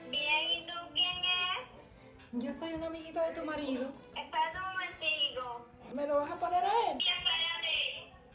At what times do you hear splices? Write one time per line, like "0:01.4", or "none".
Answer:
0:04.1
0:05.8
0:07.0